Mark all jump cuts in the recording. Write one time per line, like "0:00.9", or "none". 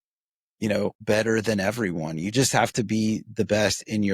0:01.0